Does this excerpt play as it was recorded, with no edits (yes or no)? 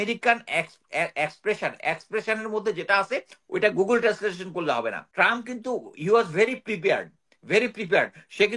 no